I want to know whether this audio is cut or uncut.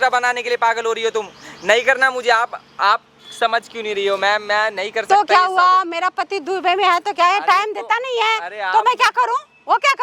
uncut